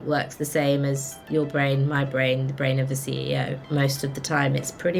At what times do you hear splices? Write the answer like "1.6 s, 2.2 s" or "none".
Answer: none